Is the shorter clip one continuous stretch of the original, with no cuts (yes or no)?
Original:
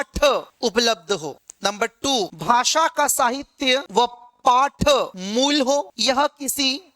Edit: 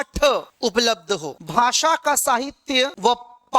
no